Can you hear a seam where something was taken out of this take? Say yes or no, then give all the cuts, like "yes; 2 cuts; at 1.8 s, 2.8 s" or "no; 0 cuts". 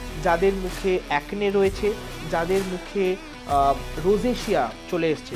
no; 0 cuts